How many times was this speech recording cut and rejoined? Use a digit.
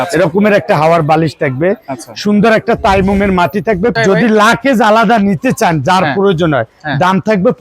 1